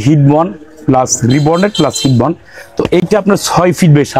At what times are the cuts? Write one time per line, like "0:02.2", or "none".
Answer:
none